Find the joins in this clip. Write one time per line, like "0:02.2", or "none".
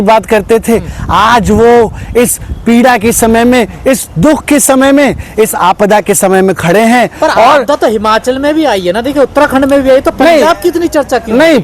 none